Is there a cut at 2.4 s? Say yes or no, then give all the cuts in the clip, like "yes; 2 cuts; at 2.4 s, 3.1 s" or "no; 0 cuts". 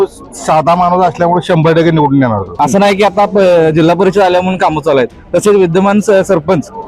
yes; 1 cut; at 2.4 s